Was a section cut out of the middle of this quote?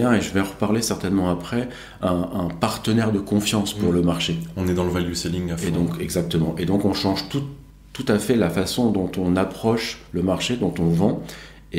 no; 0 cuts

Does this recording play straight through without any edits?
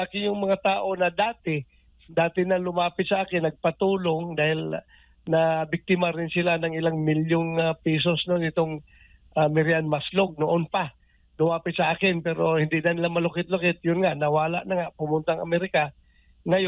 yes; 0 cuts

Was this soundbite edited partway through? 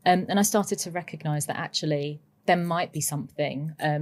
no; 0 cuts

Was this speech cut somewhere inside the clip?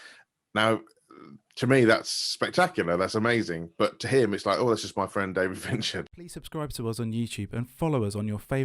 yes; 1 cut; at 6.0 s

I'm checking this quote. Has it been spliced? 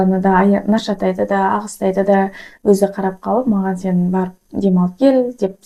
no; 0 cuts

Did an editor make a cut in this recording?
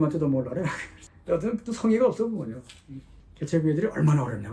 yes; 1 cut; at 3.0 s

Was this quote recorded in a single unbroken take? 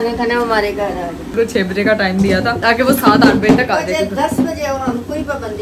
no; 1 cut; at 1.3 s

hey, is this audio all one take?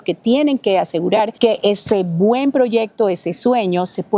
no; 1 cut; at 1.3 s

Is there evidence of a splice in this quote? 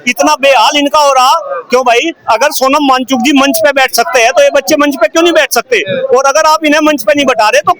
no; 0 cuts

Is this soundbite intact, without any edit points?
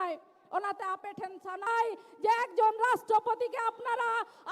no; 1 cut; at 1.7 s

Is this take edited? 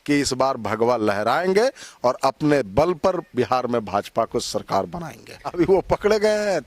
yes; 1 cut; at 5.5 s

